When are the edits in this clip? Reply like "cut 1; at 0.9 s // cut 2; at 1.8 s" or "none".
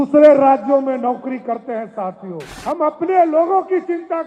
cut 1; at 2.4 s